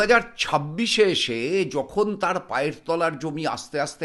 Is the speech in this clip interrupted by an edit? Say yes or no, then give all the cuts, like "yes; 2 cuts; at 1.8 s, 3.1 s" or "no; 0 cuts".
no; 0 cuts